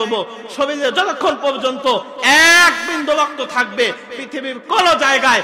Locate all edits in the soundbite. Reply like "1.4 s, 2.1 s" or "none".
none